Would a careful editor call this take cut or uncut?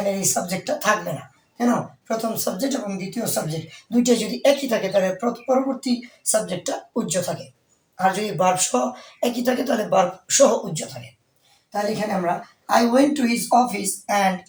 uncut